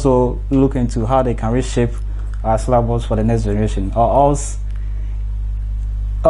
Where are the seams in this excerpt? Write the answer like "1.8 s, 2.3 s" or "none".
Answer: none